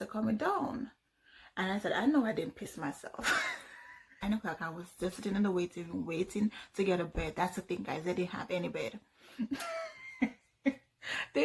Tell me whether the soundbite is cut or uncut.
cut